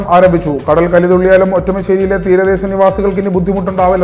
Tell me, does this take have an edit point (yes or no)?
no